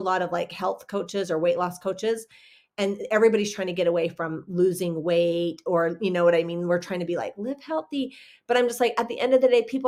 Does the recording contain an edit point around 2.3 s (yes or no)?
no